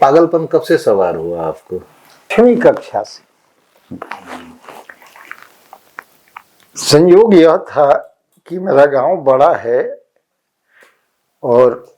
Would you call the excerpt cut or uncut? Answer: cut